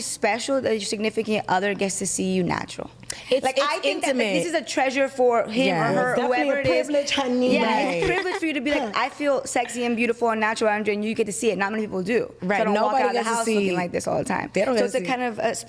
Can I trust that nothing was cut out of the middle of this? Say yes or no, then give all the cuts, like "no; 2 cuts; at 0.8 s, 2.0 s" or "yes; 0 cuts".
yes; 0 cuts